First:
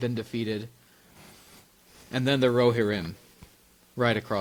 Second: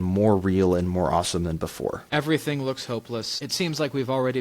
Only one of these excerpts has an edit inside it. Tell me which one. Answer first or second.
second